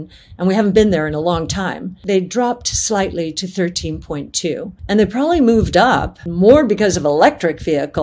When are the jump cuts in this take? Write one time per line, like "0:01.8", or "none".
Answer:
0:02.0
0:04.7
0:06.2